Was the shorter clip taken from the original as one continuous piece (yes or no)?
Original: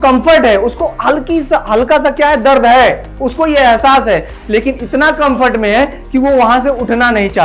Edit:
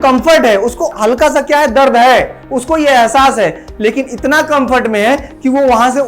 no